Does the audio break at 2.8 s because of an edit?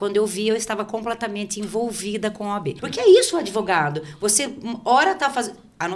yes; 1 cut; at 2.8 s

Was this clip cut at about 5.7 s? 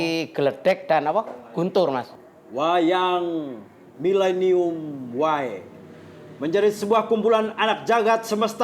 no; 1 cut; at 2.1 s

